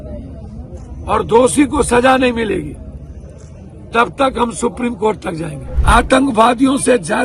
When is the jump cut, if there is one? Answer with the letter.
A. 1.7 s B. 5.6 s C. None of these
B